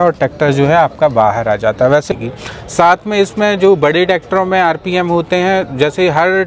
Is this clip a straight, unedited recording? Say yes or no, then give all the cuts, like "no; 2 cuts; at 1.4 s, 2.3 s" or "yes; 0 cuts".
no; 1 cut; at 2.1 s